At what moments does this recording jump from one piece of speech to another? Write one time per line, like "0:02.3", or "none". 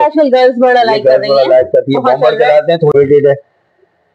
0:02.9